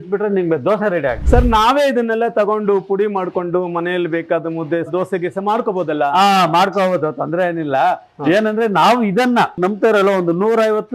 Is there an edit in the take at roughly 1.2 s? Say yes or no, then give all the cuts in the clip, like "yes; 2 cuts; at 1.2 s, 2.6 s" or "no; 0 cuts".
yes; 2 cuts; at 1.2 s, 9.6 s